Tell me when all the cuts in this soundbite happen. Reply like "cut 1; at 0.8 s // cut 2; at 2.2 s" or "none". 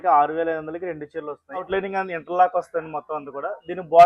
cut 1; at 1.7 s